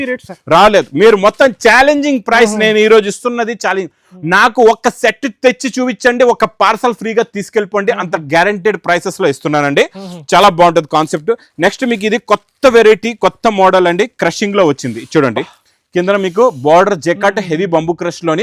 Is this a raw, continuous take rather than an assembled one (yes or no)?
yes